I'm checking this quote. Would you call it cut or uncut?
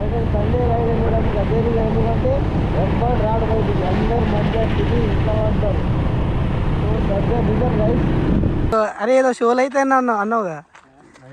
cut